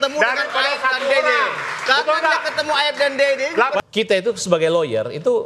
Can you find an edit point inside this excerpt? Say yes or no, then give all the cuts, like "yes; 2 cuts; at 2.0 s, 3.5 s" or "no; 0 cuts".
yes; 1 cut; at 3.8 s